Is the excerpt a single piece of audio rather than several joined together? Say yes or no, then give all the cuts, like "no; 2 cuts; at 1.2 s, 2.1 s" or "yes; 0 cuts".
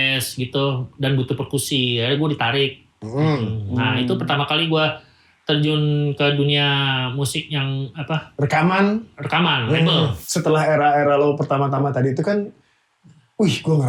no; 1 cut; at 10.2 s